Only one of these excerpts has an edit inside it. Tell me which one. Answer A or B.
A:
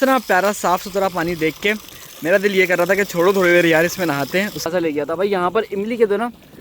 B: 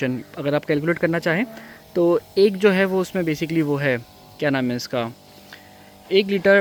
A